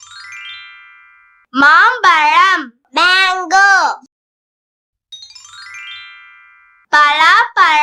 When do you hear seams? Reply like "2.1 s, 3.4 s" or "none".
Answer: none